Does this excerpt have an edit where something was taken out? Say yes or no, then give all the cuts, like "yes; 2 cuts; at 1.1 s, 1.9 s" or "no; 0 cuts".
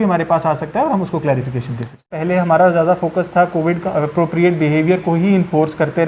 yes; 1 cut; at 2.1 s